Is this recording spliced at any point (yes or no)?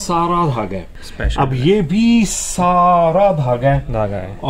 yes